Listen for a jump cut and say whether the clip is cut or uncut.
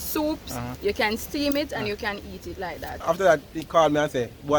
cut